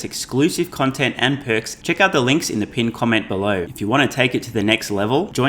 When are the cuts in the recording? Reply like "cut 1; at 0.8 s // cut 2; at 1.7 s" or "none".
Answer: cut 1; at 1.7 s // cut 2; at 3.7 s